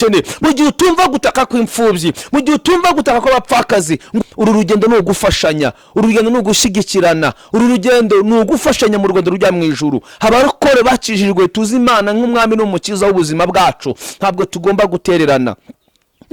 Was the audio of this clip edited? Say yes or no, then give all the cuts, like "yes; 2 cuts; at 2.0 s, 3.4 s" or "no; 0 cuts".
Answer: yes; 1 cut; at 4.2 s